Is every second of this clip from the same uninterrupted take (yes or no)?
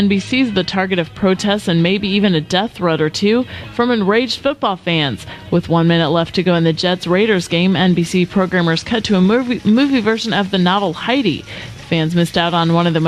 no